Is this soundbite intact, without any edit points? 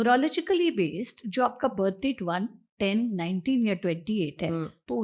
yes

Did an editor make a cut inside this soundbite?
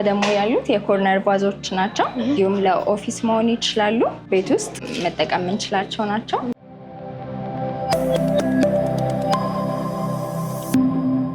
yes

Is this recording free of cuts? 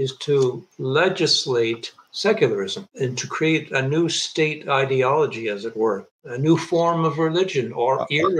yes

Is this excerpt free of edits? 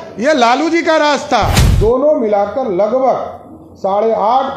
no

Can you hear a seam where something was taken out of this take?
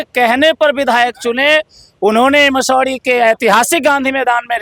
no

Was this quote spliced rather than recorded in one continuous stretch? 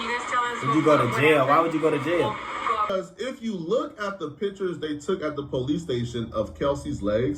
yes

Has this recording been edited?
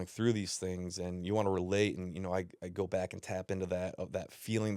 no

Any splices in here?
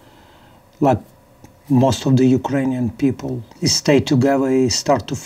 yes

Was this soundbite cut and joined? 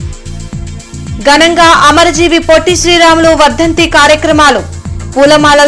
yes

